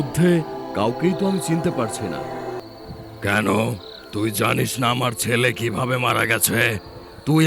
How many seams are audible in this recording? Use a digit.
1